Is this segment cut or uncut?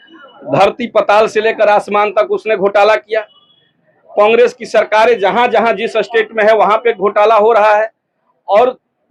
uncut